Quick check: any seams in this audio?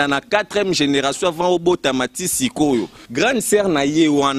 yes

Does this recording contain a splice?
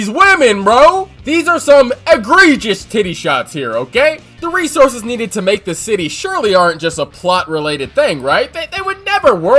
yes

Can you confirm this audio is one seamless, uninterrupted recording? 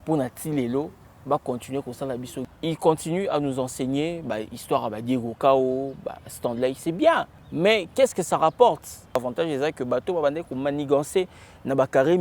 no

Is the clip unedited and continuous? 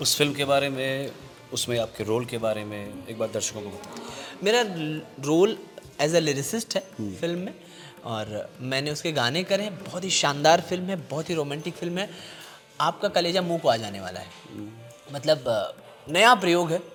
yes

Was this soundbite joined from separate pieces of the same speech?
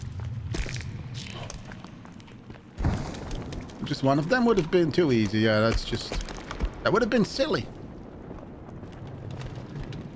no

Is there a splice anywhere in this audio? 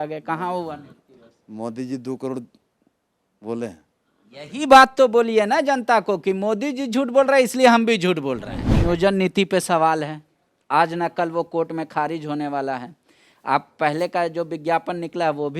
yes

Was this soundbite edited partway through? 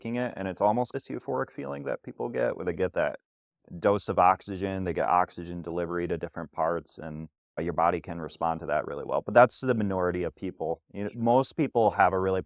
no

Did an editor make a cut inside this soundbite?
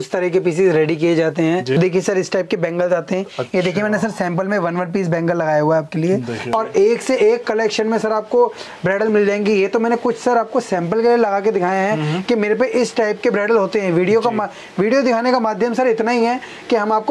yes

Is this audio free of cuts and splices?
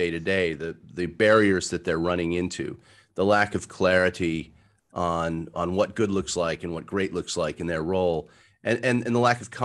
yes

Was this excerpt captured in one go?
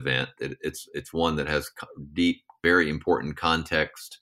no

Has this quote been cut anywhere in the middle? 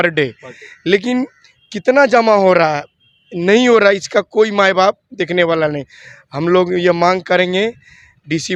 no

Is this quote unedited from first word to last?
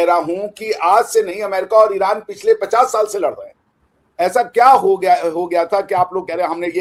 yes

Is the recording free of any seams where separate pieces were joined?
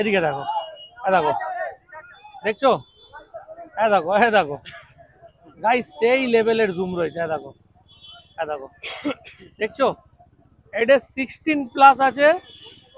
yes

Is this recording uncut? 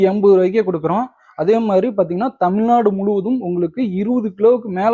yes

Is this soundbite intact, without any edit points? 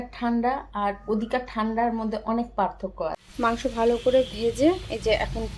no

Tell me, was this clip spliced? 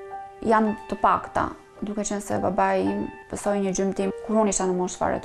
yes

